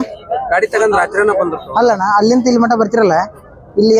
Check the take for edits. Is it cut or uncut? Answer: cut